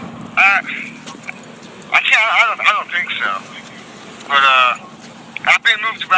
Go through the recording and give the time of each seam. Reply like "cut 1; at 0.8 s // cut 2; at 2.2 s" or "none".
none